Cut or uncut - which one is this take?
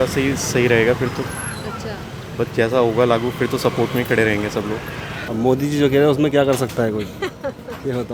cut